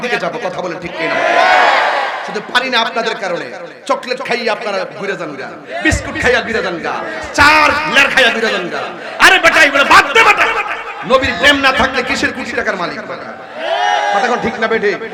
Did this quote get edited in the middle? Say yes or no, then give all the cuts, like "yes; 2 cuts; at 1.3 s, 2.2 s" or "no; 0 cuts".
no; 0 cuts